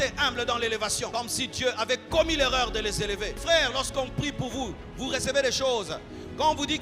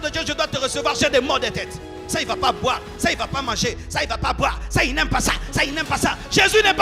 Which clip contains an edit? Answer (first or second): first